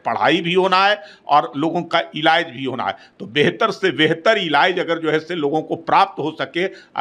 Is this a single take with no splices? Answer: yes; 0 cuts

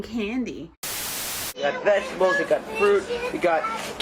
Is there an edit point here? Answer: yes; 1 cut; at 1.0 s

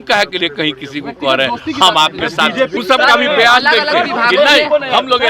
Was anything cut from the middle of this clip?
yes; 1 cut; at 2.8 s

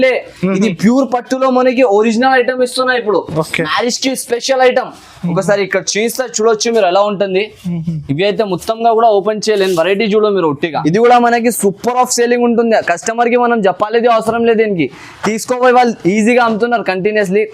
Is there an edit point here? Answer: yes; 1 cut; at 10.8 s

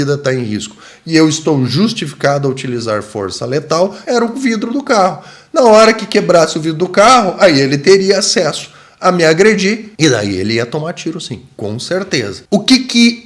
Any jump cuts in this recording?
yes; 1 cut; at 4.0 s

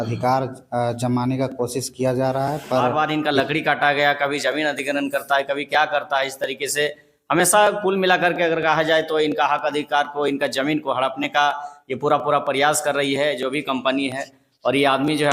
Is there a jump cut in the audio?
yes; 1 cut; at 2.9 s

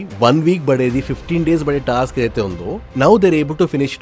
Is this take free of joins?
yes; 0 cuts

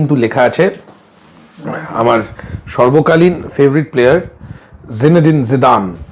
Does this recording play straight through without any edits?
yes; 0 cuts

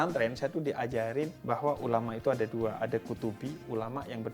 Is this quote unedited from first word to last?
no; 1 cut; at 1.4 s

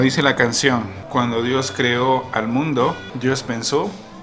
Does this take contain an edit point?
yes; 2 cuts; at 1.0 s, 3.1 s

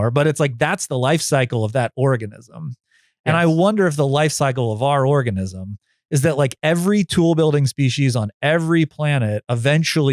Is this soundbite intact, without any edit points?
yes; 0 cuts

